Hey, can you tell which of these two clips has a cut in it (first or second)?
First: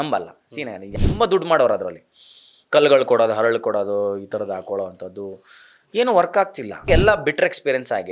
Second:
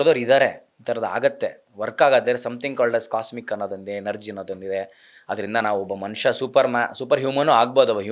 first